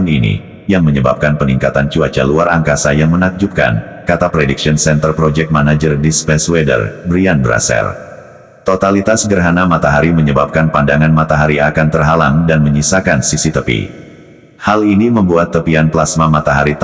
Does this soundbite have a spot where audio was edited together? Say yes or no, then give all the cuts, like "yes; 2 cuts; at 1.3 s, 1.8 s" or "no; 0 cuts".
no; 0 cuts